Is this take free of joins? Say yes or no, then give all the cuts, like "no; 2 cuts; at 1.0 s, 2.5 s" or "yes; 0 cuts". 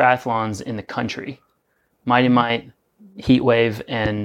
yes; 0 cuts